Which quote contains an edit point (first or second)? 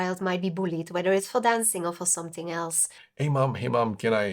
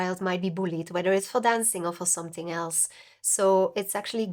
first